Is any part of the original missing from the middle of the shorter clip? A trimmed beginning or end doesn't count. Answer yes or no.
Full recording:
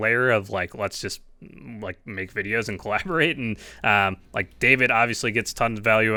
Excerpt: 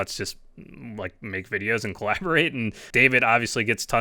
yes